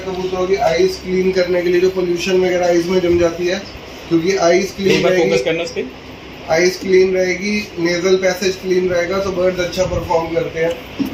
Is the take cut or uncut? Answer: uncut